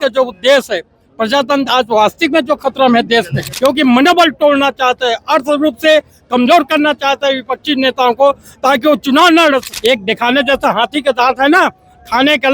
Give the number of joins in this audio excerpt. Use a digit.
2